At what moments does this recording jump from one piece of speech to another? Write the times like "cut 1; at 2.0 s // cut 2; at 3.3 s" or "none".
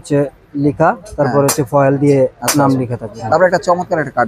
cut 1; at 3.1 s